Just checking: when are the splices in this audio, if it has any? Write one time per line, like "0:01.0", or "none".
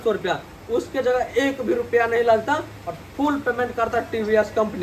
none